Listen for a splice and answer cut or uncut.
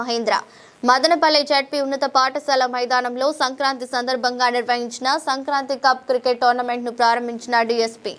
uncut